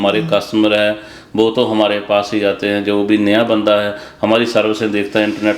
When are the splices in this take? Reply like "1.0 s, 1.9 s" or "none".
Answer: none